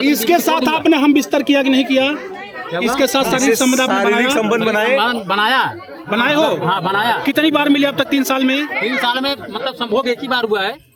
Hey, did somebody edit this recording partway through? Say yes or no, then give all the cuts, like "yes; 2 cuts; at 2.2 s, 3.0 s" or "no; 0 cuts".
no; 0 cuts